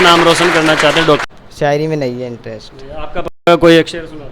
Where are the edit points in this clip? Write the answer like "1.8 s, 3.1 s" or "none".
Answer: 1.3 s